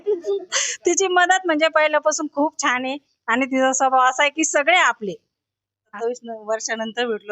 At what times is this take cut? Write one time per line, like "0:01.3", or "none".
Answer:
0:05.8